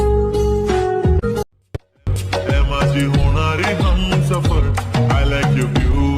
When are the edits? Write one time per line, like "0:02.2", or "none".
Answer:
0:01.5